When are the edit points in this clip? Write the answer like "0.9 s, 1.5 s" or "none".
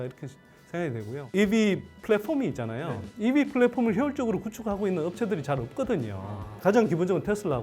1.3 s, 6.6 s